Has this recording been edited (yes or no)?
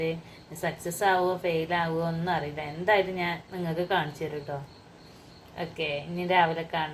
no